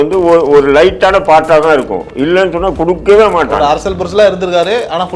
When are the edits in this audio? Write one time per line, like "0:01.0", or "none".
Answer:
none